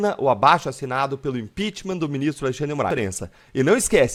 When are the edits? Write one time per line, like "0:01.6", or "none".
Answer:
none